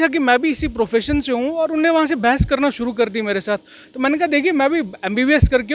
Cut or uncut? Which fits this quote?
uncut